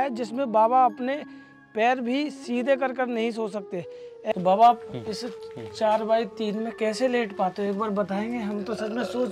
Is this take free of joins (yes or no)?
no